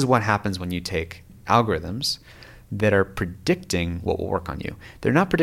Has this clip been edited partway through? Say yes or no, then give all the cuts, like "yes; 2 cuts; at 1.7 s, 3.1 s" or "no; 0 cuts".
no; 0 cuts